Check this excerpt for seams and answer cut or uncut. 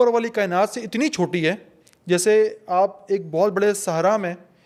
uncut